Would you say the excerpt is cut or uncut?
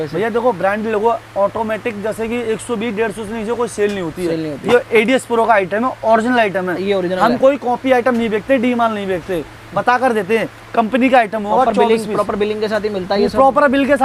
uncut